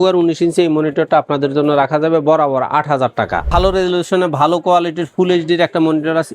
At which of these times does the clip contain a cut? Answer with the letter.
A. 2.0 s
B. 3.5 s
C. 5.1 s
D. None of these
B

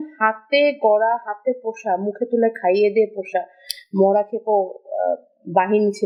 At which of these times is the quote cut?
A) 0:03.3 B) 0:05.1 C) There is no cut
C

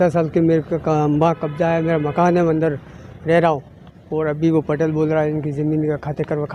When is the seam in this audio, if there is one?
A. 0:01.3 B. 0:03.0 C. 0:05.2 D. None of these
D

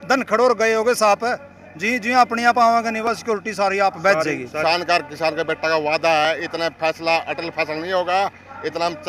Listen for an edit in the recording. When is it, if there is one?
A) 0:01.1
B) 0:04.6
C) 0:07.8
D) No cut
B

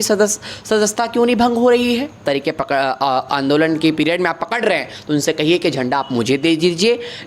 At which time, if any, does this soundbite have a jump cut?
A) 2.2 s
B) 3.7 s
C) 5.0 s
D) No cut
A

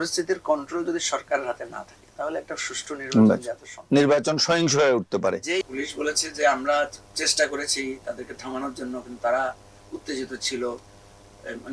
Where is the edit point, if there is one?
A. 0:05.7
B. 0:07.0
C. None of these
A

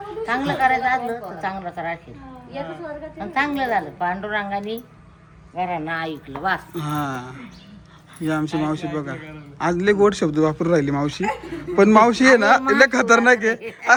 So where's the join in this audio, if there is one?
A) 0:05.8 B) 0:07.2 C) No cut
C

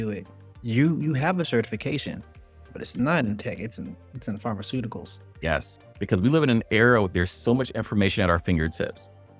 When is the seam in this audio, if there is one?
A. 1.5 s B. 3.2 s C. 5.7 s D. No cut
C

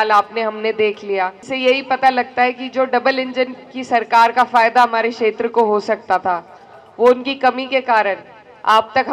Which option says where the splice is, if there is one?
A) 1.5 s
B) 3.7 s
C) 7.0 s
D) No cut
A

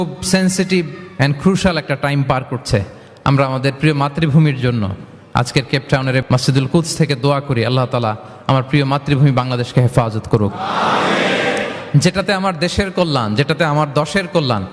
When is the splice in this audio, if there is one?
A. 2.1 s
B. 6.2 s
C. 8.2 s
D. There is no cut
B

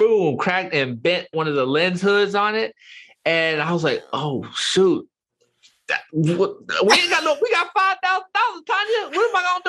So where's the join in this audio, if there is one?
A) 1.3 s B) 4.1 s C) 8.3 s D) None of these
A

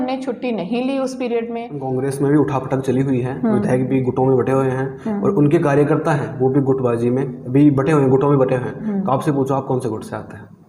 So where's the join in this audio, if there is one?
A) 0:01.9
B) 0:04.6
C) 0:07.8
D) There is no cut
A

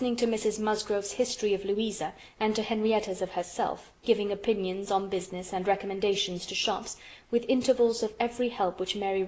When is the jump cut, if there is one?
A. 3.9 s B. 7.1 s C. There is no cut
B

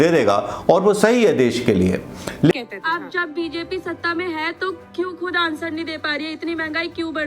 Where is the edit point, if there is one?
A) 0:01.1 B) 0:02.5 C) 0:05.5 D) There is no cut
B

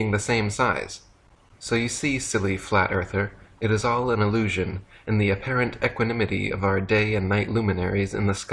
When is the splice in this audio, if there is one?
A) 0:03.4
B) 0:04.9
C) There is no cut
B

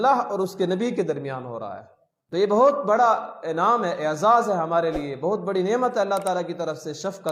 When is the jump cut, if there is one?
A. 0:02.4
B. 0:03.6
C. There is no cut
A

